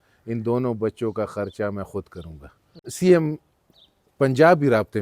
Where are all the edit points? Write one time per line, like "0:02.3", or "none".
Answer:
0:02.9